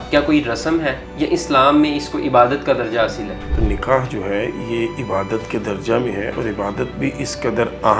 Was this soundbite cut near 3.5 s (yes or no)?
yes